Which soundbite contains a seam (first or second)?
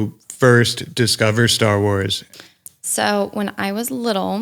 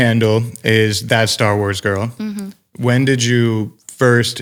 first